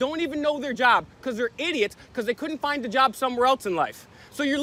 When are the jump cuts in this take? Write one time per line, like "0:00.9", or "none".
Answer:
none